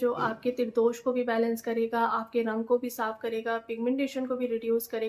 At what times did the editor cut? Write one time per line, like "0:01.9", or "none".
none